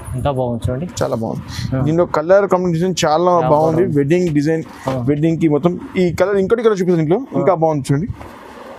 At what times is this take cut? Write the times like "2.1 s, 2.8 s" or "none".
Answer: none